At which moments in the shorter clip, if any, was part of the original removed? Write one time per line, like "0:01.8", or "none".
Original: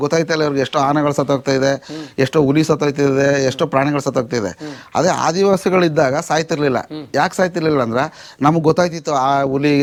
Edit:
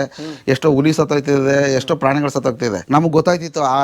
0:02.8